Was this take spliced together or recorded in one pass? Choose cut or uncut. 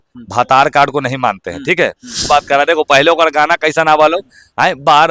cut